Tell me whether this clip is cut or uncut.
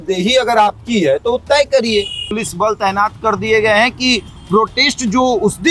cut